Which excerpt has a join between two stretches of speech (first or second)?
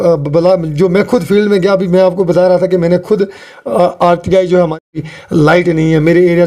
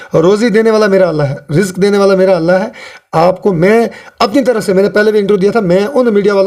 first